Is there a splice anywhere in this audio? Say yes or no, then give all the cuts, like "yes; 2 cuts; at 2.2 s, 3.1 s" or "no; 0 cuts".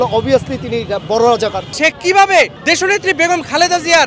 yes; 2 cuts; at 1.7 s, 2.6 s